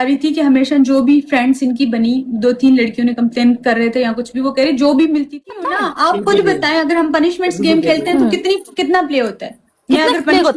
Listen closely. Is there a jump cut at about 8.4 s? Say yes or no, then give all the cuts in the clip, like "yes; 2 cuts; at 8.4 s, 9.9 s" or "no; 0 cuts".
no; 1 cut; at 5.5 s